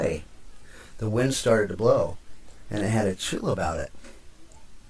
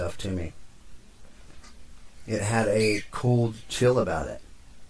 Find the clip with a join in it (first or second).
first